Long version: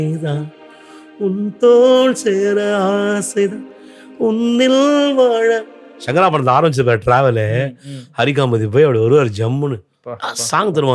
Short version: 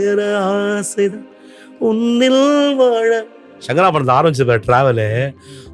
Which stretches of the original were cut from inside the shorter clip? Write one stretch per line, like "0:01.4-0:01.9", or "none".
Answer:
none